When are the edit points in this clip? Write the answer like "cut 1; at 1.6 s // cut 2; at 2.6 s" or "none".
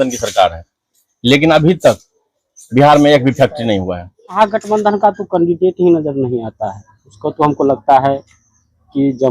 cut 1; at 4.4 s